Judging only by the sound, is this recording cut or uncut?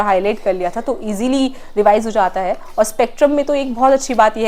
uncut